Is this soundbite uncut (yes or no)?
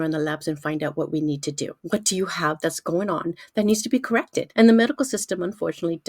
no